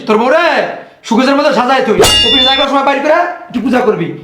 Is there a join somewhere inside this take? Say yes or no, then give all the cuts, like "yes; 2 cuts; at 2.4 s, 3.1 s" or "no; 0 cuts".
yes; 1 cut; at 2.1 s